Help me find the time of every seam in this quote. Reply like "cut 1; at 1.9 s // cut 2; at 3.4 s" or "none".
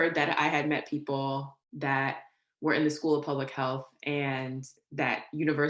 cut 1; at 1.6 s